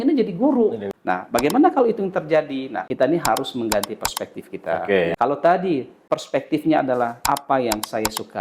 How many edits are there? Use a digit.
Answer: 5